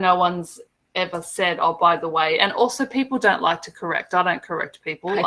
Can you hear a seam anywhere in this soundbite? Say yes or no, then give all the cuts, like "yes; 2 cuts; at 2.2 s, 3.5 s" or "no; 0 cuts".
no; 0 cuts